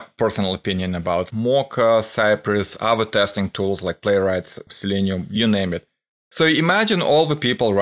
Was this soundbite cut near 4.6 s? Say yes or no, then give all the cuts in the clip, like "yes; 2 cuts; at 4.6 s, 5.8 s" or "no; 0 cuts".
yes; 2 cuts; at 1.3 s, 4.6 s